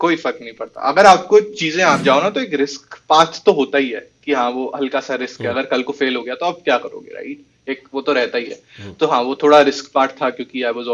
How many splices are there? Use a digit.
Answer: 1